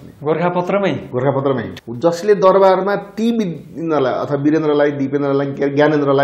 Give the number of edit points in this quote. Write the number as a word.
one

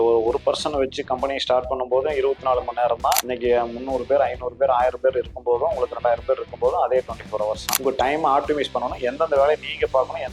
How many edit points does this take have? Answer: two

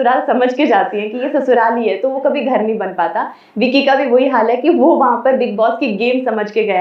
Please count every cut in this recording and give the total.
zero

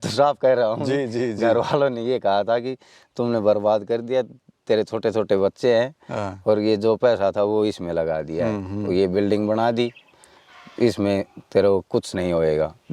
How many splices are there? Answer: zero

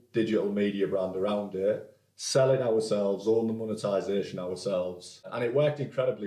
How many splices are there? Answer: one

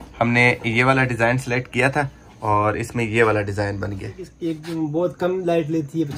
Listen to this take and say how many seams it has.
one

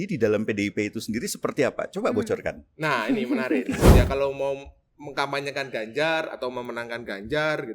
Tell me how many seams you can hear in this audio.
one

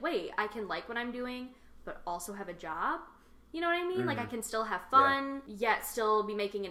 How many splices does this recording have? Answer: one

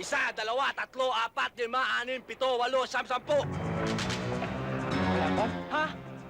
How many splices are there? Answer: one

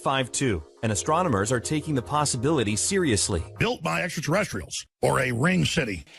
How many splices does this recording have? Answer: one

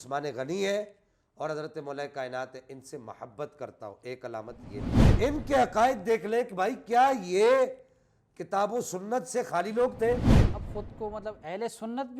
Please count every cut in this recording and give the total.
two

